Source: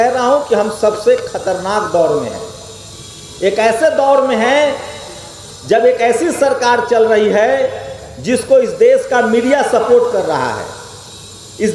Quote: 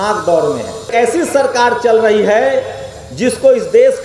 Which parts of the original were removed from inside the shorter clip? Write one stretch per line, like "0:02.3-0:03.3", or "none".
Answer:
0:02.6-0:06.0